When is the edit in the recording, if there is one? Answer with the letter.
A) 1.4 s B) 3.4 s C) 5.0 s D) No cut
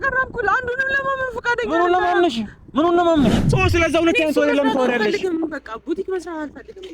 B